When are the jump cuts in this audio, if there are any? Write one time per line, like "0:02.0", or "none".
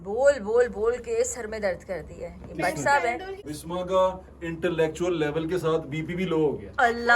0:03.5